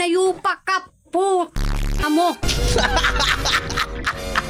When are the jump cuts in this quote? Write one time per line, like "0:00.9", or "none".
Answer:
none